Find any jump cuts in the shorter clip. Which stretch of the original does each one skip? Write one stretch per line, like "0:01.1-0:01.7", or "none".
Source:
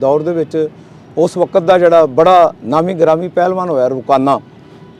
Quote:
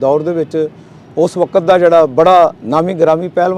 none